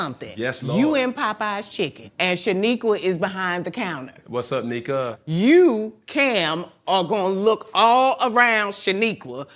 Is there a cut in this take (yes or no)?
yes